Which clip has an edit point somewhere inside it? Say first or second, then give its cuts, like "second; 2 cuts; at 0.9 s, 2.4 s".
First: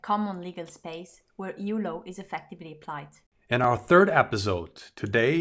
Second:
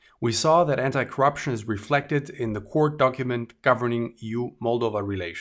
first; 1 cut; at 3.6 s